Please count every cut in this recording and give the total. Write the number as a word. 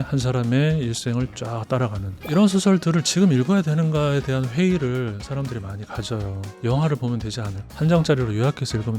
two